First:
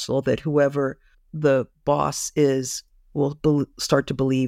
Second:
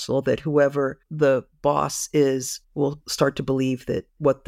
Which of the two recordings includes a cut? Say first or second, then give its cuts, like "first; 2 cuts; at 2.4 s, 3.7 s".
second; 2 cuts; at 1.0 s, 2.9 s